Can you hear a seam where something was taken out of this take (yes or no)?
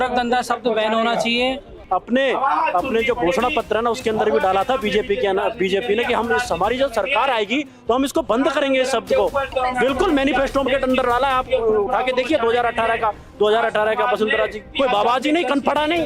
yes